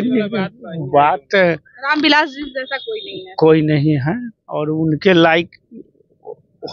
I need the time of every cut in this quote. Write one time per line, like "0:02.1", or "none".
none